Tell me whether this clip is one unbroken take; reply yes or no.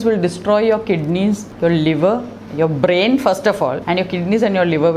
no